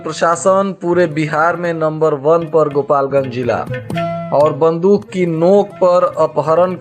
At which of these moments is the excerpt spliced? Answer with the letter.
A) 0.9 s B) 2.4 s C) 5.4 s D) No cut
D